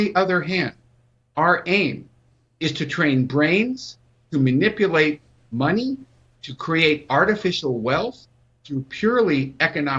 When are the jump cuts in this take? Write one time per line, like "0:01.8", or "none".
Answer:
none